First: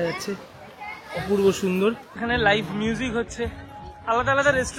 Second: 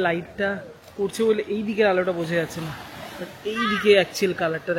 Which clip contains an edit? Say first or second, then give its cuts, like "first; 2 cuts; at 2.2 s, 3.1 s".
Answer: first; 1 cut; at 2.1 s